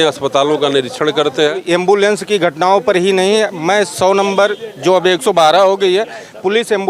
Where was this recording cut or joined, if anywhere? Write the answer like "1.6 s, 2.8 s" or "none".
1.6 s